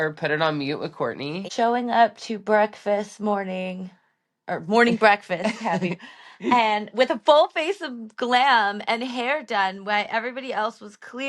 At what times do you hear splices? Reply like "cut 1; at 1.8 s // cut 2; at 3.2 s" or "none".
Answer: cut 1; at 1.4 s